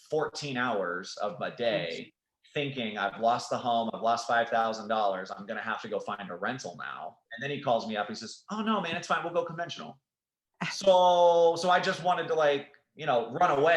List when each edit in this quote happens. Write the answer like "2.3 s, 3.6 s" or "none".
7.2 s, 10.1 s